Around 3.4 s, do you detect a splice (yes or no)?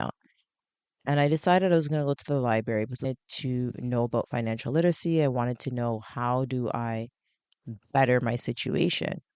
no